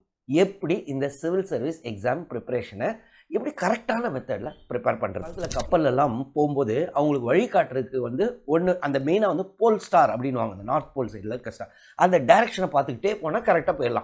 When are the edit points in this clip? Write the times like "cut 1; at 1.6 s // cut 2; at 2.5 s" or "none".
cut 1; at 5.7 s